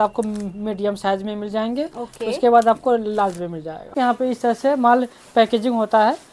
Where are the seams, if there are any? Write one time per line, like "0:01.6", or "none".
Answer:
0:03.9